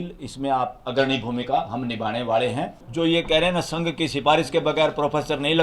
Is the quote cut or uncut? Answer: cut